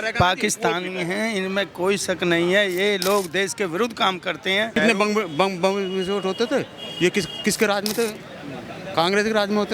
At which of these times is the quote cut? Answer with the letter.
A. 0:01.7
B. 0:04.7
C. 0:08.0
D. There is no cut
B